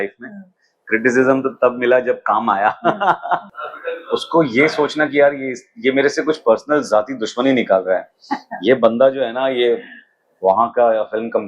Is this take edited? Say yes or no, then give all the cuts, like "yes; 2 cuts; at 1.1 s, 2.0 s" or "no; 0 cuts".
yes; 1 cut; at 3.5 s